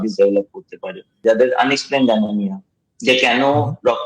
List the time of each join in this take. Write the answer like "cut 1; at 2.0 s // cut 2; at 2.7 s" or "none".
cut 1; at 1.2 s